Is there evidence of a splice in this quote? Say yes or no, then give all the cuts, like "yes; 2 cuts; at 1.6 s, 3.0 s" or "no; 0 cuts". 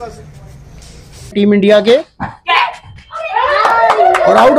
no; 0 cuts